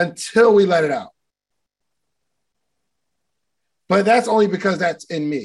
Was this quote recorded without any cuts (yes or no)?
yes